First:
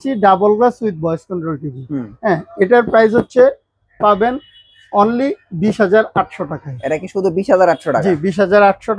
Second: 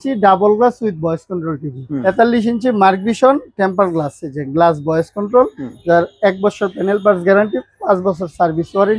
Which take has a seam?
second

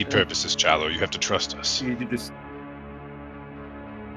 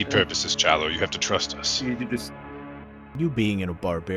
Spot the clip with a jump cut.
second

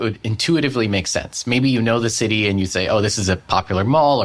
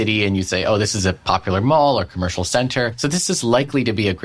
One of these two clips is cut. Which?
second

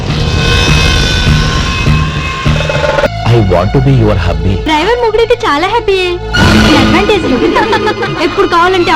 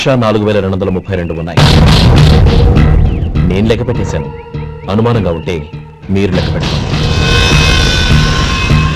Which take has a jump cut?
first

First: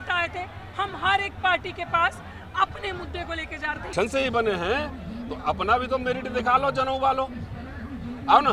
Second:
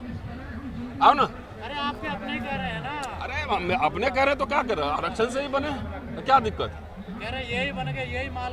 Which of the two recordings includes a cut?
first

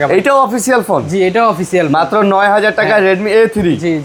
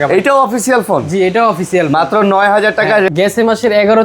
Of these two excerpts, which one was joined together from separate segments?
second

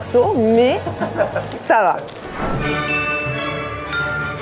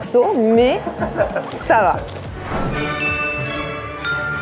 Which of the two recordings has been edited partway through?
first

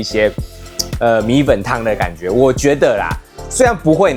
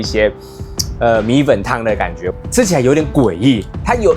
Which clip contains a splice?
second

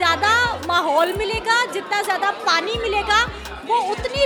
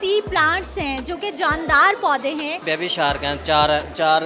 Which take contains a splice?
second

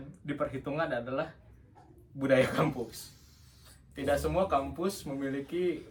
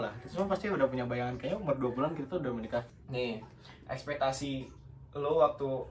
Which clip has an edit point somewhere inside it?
second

